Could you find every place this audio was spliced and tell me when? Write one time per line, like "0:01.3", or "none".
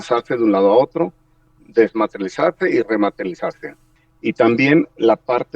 0:03.9